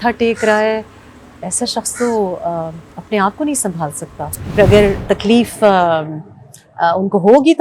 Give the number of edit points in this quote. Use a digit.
1